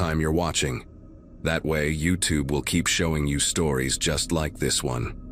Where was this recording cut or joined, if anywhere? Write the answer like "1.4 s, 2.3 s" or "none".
none